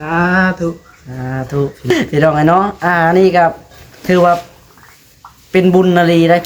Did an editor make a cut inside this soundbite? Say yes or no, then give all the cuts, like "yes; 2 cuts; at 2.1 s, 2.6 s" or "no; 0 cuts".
yes; 1 cut; at 1.9 s